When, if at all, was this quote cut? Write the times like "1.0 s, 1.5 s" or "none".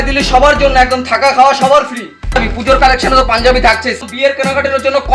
2.4 s, 4.0 s